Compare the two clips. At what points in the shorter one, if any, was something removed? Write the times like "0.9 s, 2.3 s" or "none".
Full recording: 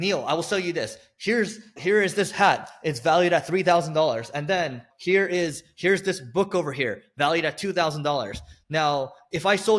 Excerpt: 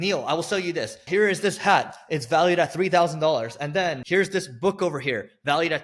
1.0 s, 4.0 s